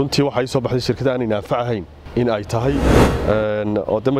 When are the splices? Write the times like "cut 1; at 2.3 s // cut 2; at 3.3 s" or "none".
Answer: cut 1; at 2.0 s // cut 2; at 3.0 s